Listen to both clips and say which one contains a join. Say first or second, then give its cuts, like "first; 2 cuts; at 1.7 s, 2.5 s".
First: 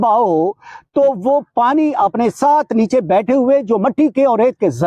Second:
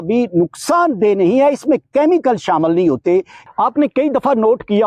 second; 1 cut; at 3.4 s